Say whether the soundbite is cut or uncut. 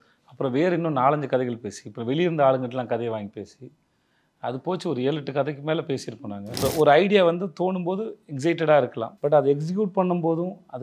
cut